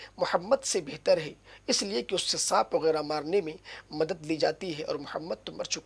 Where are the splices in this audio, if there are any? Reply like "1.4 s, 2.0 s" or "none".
none